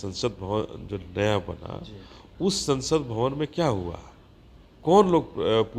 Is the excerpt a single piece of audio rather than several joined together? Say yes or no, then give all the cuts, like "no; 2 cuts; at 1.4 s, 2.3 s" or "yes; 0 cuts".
yes; 0 cuts